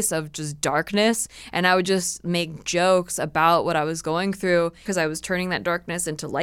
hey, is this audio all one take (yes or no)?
no